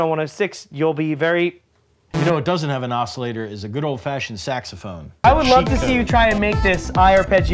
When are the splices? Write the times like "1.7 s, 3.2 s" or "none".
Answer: 2.0 s, 5.2 s